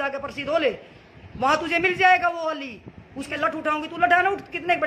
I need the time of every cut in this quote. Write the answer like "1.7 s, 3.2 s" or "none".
3.3 s